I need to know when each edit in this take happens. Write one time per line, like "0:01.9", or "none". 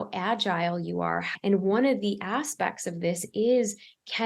0:01.3